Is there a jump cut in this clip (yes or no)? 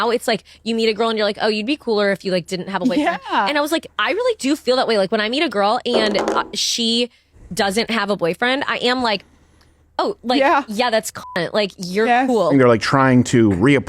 yes